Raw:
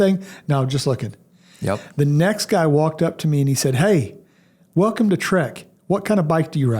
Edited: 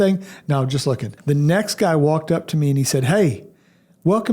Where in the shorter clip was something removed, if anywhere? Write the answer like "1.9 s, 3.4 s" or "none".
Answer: 1.2 s